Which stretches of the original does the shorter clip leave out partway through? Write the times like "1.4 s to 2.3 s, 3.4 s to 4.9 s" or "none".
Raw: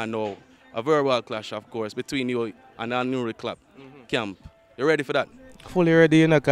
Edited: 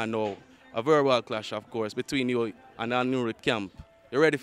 3.4 s to 4.0 s

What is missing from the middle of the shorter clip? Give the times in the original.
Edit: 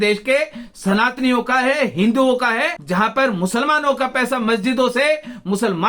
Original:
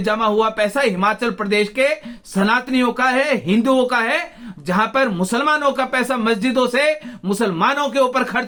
4.3 s to 4.6 s

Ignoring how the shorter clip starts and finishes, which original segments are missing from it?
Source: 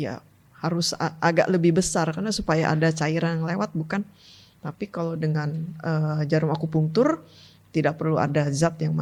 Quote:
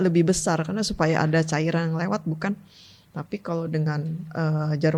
none

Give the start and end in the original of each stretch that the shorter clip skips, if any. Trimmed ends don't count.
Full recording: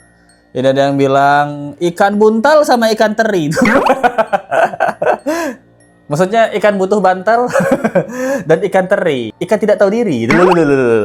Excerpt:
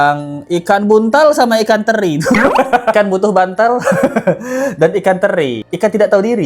4.2 s to 6.6 s

